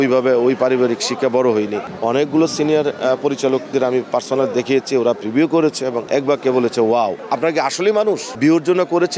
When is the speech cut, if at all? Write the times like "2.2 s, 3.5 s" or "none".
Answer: 1.9 s, 6.0 s, 7.2 s, 8.3 s